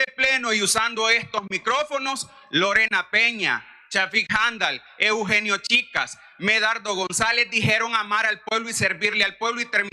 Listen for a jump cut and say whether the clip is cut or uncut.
uncut